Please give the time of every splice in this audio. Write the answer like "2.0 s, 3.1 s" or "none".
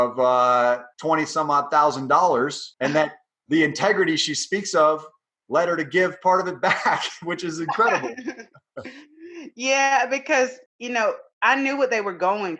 0.9 s, 2.6 s, 10.6 s